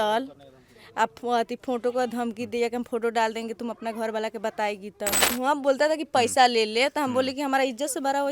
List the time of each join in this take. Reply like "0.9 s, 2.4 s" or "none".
5.3 s